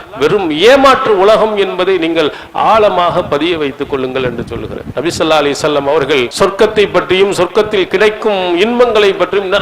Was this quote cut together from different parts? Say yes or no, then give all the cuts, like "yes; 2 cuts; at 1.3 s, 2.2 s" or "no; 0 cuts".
yes; 2 cuts; at 4.8 s, 6.3 s